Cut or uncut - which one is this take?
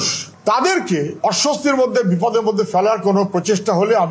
uncut